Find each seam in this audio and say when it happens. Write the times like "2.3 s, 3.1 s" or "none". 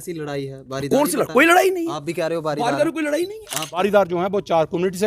3.8 s